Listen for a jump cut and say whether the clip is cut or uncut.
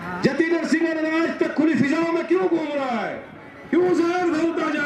uncut